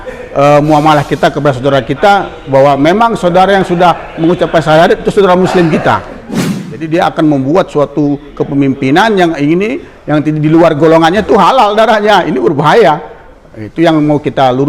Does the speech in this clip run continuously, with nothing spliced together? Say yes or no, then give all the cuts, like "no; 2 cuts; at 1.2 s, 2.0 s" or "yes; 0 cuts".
no; 1 cut; at 6.7 s